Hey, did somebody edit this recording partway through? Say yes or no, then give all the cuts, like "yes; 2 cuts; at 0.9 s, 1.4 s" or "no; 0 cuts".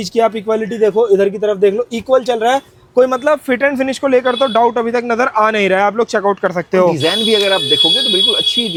no; 0 cuts